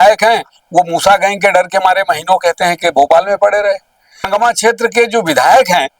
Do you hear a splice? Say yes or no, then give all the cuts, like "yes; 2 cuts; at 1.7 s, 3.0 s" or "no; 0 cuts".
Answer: yes; 1 cut; at 4.3 s